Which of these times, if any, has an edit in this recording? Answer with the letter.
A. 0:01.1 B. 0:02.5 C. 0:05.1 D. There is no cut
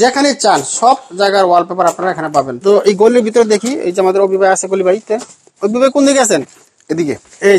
B